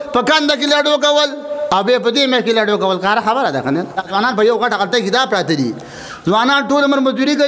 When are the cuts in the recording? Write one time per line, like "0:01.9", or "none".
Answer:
0:04.0

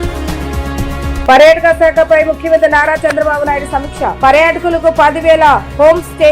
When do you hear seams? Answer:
0:01.2

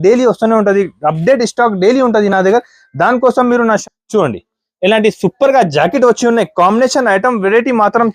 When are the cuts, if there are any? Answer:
0:03.8

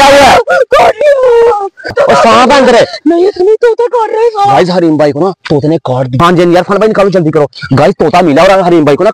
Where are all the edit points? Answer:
0:01.4
0:06.1

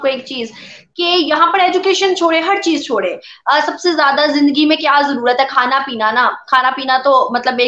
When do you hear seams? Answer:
none

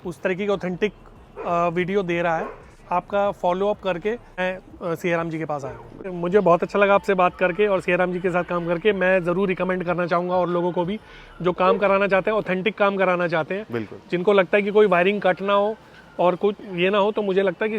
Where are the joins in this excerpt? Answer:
0:02.7
0:04.4
0:06.1

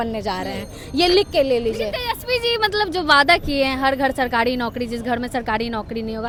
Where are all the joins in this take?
none

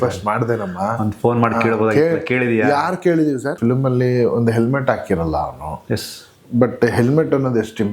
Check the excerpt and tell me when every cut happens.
0:03.5

